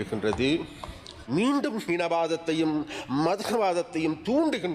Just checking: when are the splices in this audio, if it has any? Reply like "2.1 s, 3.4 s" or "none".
1.1 s